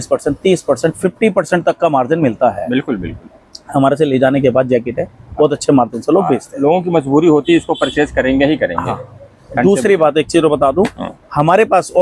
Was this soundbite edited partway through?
no; 0 cuts

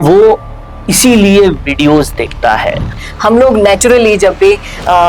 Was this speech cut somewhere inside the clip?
yes; 1 cut; at 3.0 s

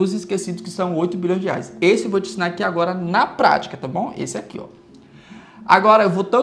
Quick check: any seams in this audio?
no; 0 cuts

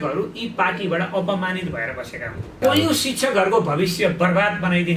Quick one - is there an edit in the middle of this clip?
yes; 1 cut; at 2.5 s

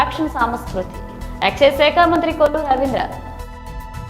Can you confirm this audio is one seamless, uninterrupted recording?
no; 1 cut; at 3.2 s

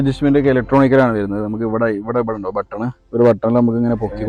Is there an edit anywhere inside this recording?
no; 0 cuts

